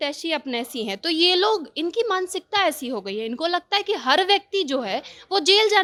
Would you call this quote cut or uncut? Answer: uncut